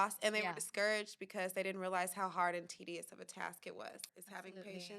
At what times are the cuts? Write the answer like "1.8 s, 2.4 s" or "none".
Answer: 4.1 s